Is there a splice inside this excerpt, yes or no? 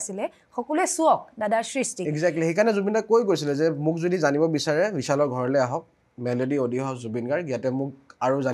no